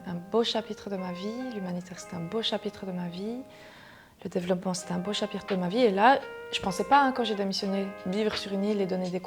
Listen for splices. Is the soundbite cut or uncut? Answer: cut